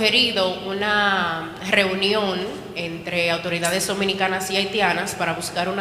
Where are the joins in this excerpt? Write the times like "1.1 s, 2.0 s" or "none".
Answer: none